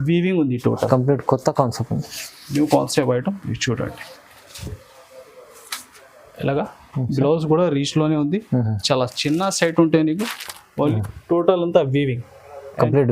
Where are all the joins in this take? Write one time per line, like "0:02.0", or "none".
0:10.9